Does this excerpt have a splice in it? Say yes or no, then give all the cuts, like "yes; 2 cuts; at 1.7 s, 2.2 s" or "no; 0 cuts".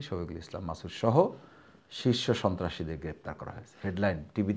no; 0 cuts